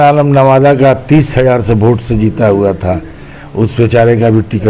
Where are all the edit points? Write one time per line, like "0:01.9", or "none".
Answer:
none